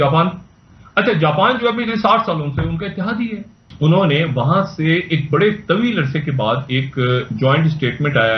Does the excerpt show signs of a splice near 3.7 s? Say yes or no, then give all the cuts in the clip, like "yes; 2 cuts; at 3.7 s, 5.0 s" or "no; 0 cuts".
yes; 1 cut; at 3.7 s